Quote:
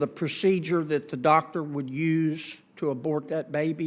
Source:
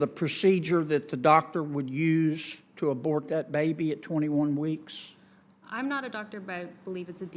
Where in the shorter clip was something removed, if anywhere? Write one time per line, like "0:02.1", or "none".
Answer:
none